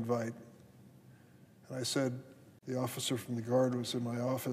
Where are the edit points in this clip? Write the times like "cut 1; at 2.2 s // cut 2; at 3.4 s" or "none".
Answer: none